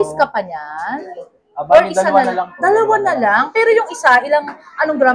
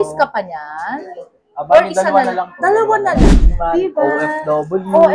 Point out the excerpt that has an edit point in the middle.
second; 1 cut; at 3.2 s

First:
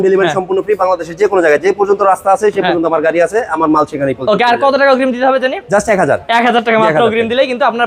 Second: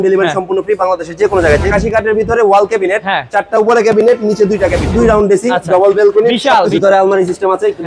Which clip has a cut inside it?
second; 3 cuts; at 1.7 s, 4.9 s, 6.7 s

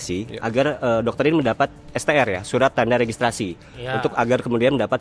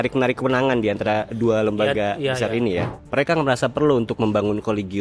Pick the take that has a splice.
second; 1 cut; at 2.9 s

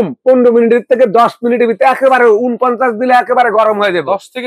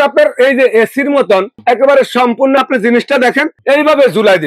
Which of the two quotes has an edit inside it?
second; 2 cuts; at 1.5 s, 3.5 s

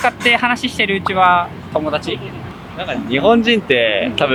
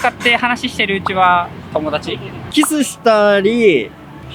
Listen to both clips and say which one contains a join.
second; 1 cut; at 2.4 s

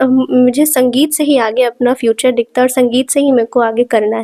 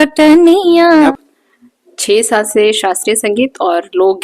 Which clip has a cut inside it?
second; 1 cut; at 1.1 s

